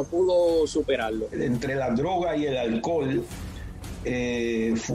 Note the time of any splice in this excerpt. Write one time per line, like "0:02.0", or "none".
0:01.3